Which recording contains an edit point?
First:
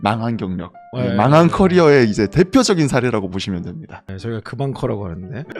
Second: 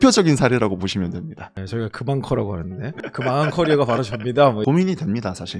second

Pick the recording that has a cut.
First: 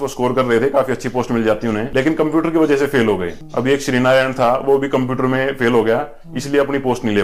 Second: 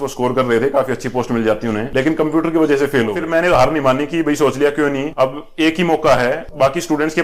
second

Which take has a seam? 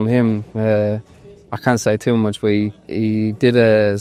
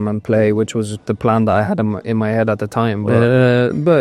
second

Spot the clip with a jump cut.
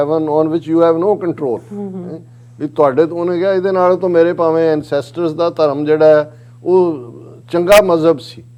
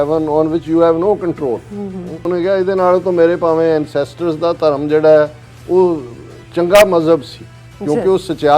second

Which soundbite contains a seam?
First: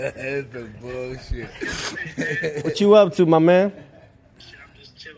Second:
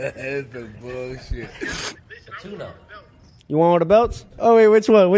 second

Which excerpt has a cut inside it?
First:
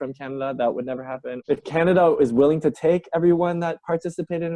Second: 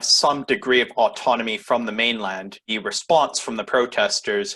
first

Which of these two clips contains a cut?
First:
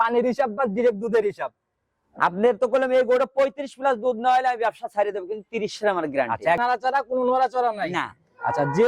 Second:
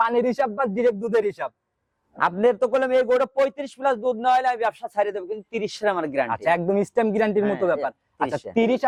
first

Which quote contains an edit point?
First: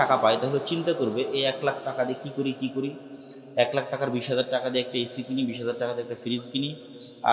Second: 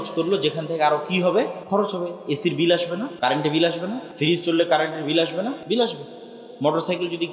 second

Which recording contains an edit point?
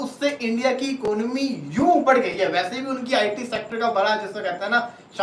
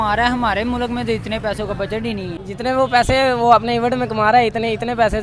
second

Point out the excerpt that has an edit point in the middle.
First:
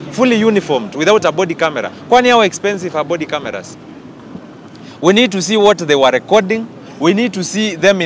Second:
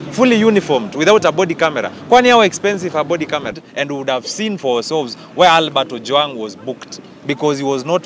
second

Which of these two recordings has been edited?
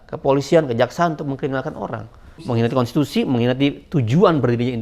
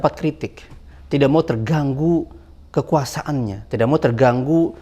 first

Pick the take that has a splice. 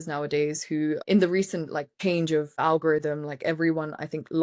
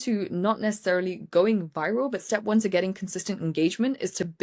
first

